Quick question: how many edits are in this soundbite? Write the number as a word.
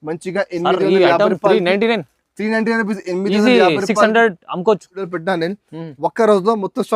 one